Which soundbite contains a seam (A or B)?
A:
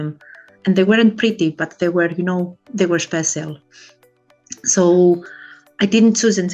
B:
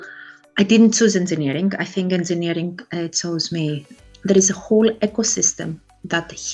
B